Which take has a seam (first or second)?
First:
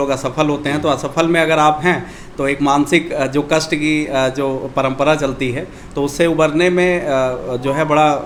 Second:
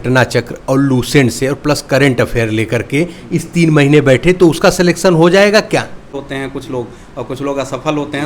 second